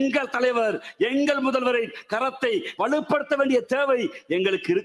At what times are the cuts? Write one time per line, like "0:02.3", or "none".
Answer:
0:02.7